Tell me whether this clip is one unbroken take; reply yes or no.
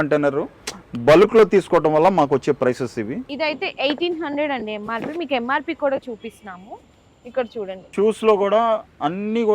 no